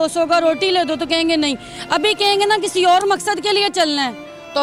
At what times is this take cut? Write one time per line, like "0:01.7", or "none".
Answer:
none